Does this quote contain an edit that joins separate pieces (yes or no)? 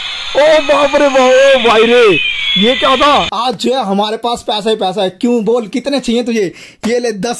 yes